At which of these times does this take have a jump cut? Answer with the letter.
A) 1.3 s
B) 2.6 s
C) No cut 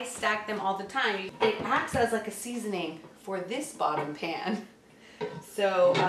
A